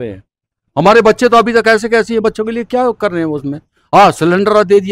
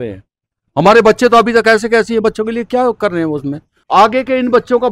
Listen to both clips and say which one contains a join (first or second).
second